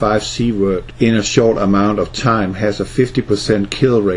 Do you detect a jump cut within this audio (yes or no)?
yes